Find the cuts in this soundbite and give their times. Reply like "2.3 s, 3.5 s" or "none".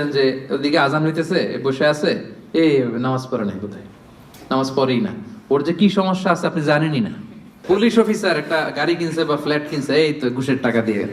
7.6 s